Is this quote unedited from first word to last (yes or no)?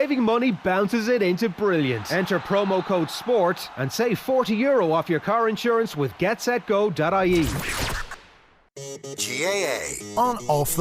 no